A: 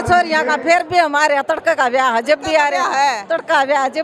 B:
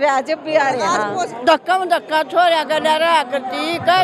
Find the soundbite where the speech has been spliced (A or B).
B